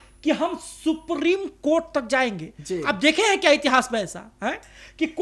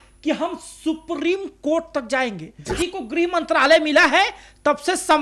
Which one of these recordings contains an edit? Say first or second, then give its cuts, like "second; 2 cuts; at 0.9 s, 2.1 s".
second; 1 cut; at 2.7 s